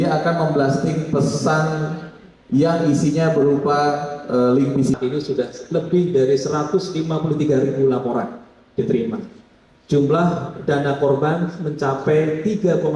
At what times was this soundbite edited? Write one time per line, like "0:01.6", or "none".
0:05.0